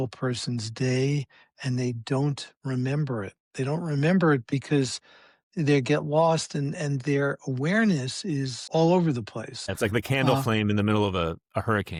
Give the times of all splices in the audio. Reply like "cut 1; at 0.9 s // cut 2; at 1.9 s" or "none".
none